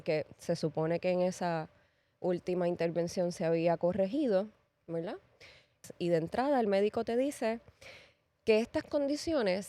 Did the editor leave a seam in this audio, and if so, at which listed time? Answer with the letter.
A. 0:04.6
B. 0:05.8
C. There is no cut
B